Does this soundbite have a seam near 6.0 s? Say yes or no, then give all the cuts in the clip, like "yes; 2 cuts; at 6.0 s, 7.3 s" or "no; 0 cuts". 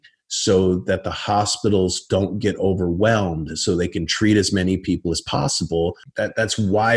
yes; 1 cut; at 6.0 s